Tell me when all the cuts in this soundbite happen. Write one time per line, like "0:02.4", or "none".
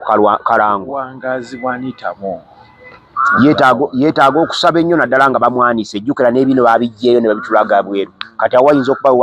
0:01.0